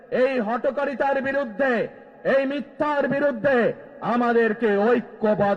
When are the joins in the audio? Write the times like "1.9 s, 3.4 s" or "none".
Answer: none